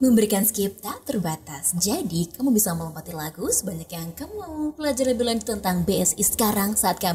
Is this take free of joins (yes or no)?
yes